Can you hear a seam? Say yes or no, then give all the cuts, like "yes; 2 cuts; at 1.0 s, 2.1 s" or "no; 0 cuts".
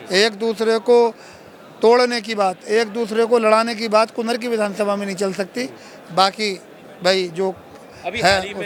no; 0 cuts